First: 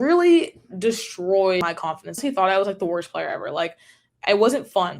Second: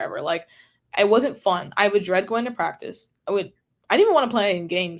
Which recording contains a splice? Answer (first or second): first